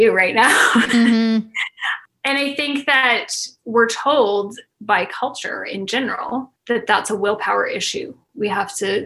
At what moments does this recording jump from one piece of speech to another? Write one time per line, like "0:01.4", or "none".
none